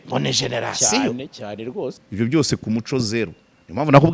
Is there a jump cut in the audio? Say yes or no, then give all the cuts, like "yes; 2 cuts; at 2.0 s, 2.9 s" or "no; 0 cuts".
yes; 1 cut; at 2.0 s